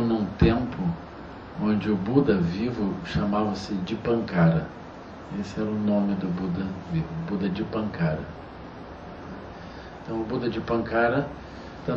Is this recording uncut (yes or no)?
yes